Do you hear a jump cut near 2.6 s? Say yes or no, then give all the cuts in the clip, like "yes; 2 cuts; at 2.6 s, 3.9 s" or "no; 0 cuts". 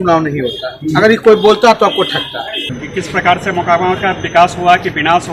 yes; 1 cut; at 2.6 s